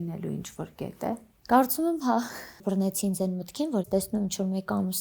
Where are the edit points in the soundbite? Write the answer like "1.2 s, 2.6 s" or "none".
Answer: 1.3 s, 2.6 s, 3.8 s